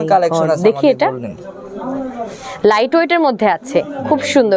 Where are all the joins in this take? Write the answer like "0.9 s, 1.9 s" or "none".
none